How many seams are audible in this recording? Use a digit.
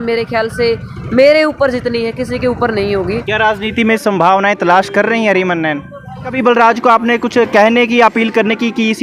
2